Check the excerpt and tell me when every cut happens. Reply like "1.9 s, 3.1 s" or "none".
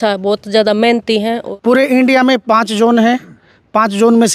1.4 s